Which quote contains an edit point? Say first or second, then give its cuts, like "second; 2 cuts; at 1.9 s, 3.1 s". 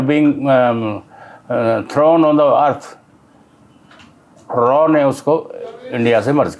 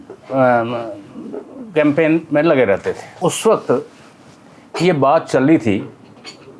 second; 1 cut; at 3.1 s